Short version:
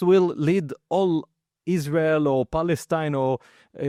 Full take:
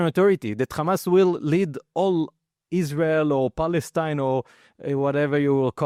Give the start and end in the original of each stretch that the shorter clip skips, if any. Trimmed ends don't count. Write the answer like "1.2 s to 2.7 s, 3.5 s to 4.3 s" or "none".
none